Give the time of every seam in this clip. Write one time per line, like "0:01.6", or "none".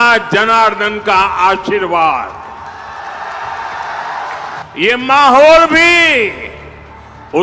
0:04.6